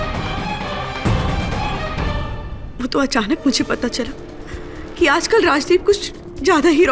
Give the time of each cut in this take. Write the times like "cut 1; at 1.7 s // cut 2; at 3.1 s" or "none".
none